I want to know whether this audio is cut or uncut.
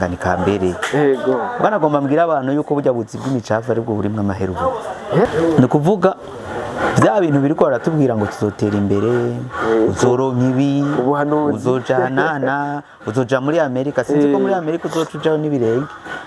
cut